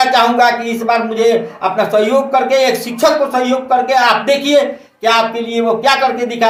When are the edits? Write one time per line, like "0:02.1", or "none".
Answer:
none